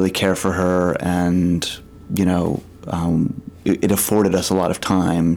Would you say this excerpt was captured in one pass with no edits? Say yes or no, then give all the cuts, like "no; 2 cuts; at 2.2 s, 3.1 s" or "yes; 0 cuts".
yes; 0 cuts